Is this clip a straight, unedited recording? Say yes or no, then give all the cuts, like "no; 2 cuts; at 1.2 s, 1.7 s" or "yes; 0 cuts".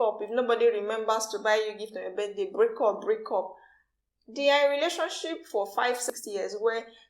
no; 1 cut; at 6.0 s